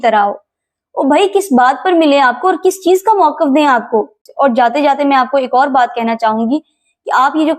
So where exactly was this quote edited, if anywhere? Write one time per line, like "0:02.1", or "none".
0:04.2